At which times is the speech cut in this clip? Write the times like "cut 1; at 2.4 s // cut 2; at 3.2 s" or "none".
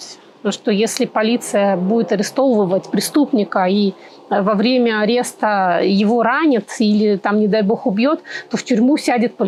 none

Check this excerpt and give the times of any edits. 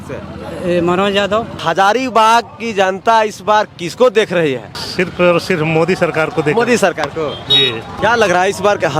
cut 1; at 1.6 s // cut 2; at 4.8 s // cut 3; at 7.8 s

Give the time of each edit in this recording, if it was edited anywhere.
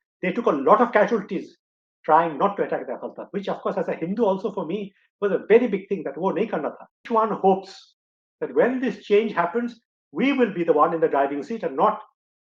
cut 1; at 7.0 s

